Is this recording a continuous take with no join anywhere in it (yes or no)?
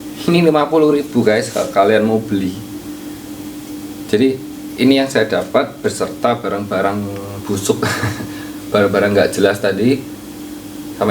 no